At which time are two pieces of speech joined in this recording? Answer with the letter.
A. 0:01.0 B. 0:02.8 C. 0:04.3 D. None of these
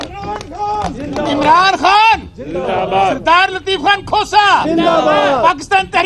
D